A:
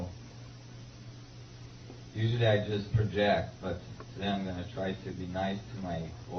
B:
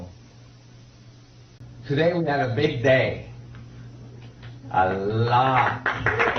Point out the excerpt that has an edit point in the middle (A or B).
A